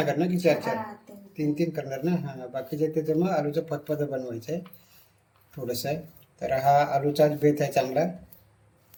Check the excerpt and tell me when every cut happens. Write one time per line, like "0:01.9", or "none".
none